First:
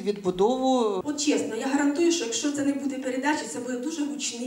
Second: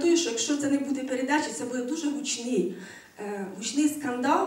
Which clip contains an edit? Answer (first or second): first